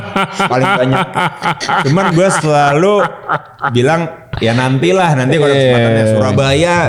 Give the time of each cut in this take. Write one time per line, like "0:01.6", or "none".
none